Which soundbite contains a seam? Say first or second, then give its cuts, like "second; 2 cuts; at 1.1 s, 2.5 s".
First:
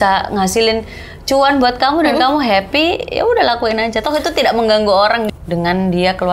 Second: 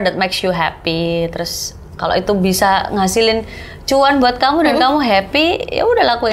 first; 1 cut; at 5.2 s